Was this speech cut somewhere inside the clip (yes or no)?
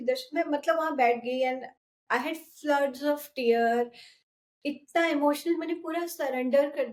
no